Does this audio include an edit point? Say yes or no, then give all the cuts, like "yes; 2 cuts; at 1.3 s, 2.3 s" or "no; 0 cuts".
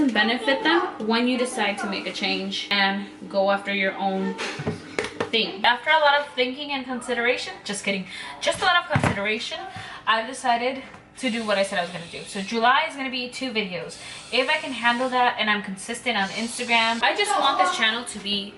yes; 2 cuts; at 5.6 s, 17.0 s